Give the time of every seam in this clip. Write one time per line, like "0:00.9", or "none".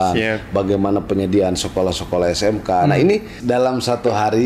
0:03.3